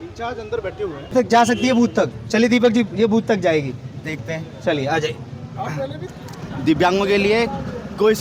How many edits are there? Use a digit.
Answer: 2